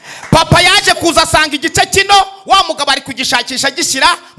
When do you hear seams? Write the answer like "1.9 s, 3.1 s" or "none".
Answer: none